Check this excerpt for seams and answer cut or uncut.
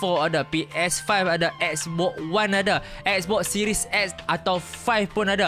uncut